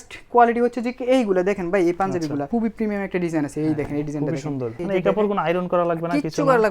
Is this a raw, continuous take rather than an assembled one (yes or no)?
no